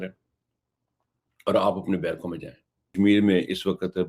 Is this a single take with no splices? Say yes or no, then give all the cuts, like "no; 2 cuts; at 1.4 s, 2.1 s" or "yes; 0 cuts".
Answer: no; 1 cut; at 2.9 s